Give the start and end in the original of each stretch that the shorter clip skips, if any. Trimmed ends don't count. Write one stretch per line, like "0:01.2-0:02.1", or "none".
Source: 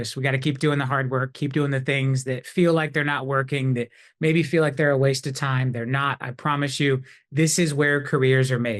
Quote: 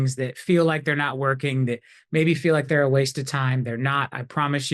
none